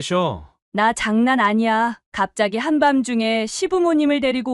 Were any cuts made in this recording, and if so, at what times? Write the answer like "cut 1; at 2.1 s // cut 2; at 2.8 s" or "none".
none